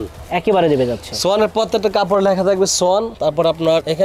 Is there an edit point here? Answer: no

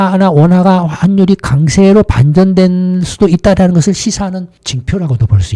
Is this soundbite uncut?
yes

